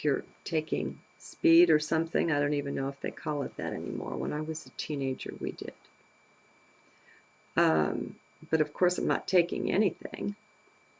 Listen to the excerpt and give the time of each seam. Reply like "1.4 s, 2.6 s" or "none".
3.0 s